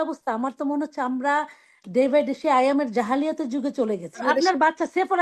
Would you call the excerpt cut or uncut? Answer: cut